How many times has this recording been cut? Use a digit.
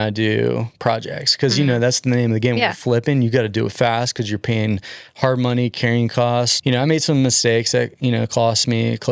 1